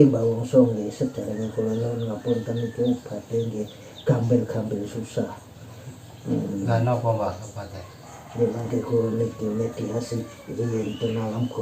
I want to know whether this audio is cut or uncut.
uncut